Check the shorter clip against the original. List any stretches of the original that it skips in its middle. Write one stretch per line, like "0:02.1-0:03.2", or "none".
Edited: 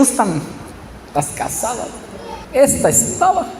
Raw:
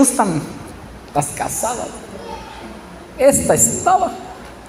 0:02.4-0:03.0